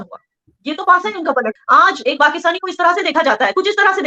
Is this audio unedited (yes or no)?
no